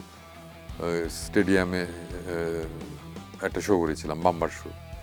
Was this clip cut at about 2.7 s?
no; 0 cuts

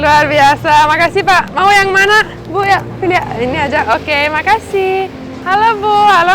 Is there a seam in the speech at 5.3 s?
yes; 1 cut; at 5.3 s

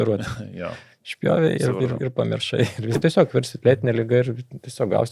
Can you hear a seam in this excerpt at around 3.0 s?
yes; 1 cut; at 3.0 s

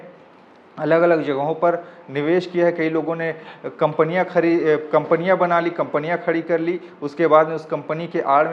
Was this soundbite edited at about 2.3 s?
no; 0 cuts

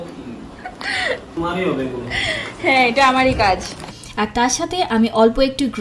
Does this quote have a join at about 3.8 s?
yes; 1 cut; at 3.8 s

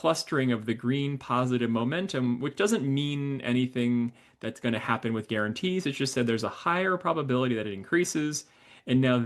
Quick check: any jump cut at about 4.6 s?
no; 0 cuts

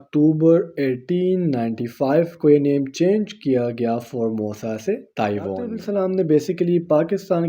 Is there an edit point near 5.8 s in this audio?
yes; 1 cut; at 5.8 s

